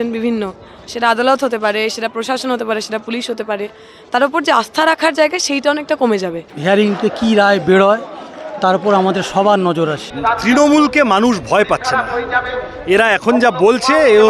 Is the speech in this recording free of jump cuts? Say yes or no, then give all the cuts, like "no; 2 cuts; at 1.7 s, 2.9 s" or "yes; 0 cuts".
no; 2 cuts; at 6.5 s, 10.1 s